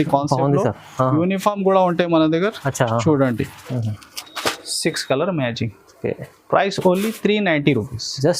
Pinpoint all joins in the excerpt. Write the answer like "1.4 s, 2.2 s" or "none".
3.6 s